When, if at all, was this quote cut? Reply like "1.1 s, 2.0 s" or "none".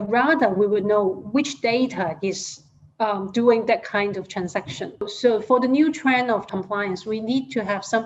5.1 s, 6.5 s